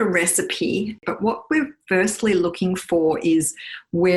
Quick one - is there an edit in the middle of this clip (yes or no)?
yes